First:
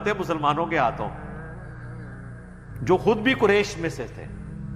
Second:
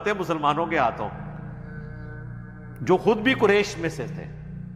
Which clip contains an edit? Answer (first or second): second